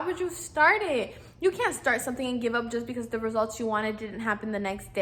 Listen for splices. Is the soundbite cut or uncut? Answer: uncut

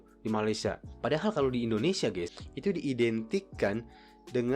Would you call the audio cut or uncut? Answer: cut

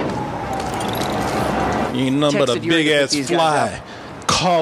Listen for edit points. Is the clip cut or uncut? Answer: uncut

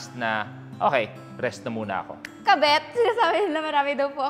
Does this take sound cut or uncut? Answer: cut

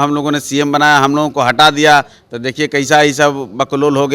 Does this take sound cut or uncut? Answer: uncut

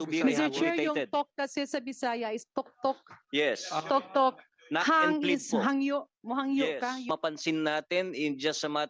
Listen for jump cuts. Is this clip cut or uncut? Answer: cut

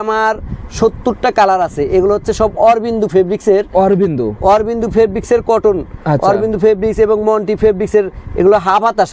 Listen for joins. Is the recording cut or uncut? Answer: uncut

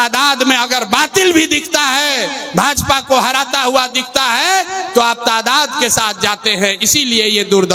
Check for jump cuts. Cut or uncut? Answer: uncut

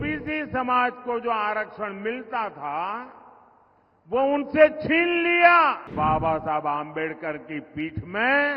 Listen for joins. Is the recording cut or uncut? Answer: cut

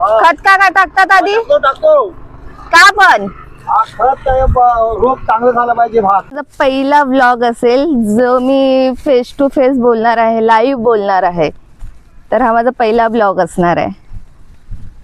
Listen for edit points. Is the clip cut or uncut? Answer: cut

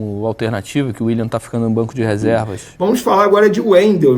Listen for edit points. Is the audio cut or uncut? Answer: cut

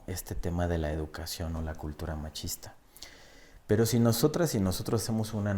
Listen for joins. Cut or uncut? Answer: uncut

